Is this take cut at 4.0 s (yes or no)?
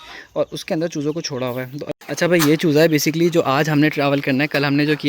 no